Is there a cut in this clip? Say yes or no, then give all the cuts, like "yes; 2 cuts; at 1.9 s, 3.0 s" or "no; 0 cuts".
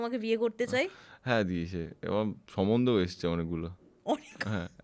no; 0 cuts